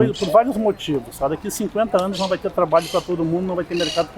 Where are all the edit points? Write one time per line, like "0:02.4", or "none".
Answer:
none